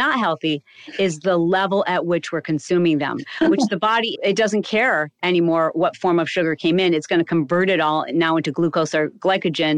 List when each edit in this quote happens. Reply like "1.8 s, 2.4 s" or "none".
5.7 s